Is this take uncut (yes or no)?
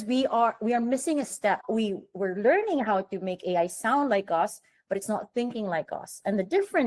no